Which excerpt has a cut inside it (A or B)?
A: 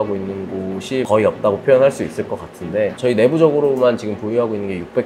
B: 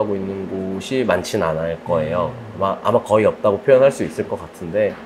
A